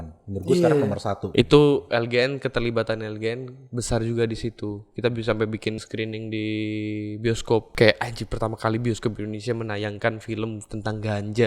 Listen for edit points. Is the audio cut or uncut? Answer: cut